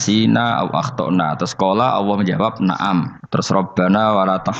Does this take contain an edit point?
yes; 1 cut; at 3.2 s

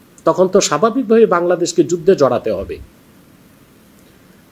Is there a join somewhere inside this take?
no; 0 cuts

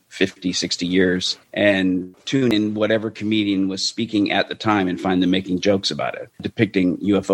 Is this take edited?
yes; 3 cuts; at 1.4 s, 2.4 s, 6.5 s

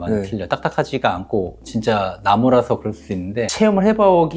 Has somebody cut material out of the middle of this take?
no; 0 cuts

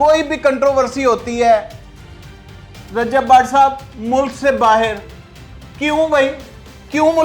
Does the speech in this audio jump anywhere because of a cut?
no; 0 cuts

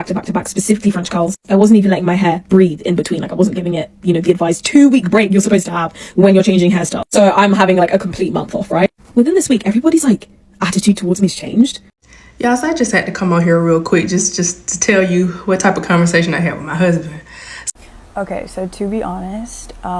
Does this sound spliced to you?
yes; 2 cuts; at 11.9 s, 17.7 s

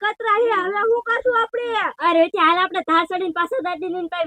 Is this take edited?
no; 0 cuts

